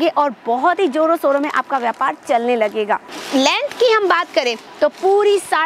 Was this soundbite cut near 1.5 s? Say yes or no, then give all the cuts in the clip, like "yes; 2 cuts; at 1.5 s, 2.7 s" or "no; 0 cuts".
no; 1 cut; at 3.1 s